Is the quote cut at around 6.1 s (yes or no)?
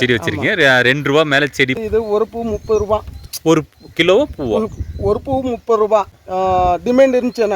yes